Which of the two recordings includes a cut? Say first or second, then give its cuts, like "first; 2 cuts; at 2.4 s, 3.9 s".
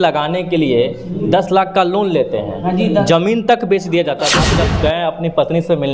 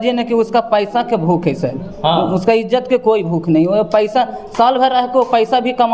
first; 1 cut; at 4.4 s